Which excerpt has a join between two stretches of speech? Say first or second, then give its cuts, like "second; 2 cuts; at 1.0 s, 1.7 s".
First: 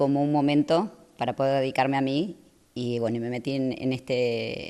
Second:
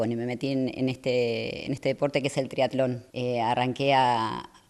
second; 1 cut; at 3.1 s